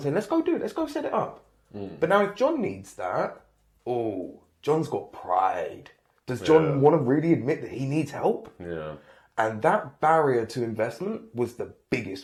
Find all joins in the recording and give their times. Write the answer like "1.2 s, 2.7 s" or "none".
none